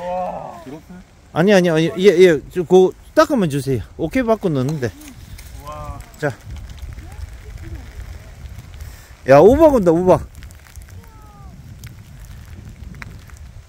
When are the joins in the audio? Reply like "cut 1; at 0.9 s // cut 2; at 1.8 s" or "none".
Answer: none